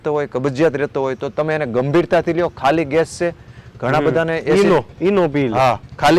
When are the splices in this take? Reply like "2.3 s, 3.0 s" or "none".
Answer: none